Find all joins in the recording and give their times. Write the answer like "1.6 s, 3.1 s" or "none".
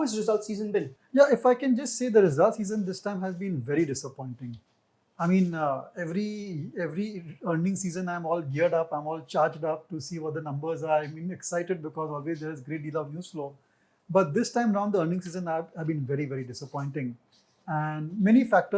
1.0 s